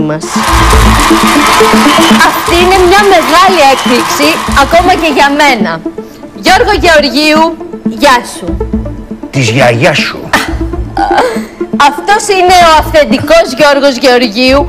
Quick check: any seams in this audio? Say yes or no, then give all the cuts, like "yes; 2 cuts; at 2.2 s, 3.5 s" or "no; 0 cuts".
yes; 1 cut; at 6.4 s